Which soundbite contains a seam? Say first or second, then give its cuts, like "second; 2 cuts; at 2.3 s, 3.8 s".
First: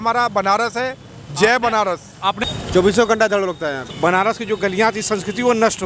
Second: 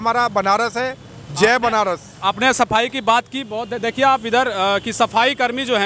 first; 2 cuts; at 2.4 s, 3.9 s